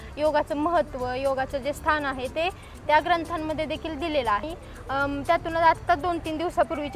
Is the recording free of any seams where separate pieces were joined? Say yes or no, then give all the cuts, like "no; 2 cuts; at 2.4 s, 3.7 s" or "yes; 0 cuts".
no; 1 cut; at 4.4 s